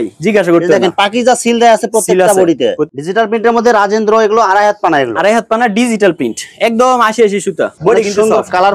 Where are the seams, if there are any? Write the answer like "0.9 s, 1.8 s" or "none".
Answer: 2.9 s, 7.7 s